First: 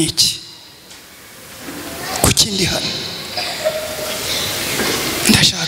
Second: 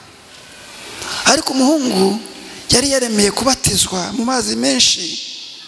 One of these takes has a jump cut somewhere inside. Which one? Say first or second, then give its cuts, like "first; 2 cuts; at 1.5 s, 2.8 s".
second; 1 cut; at 1.0 s